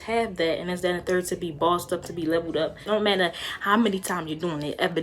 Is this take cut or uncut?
cut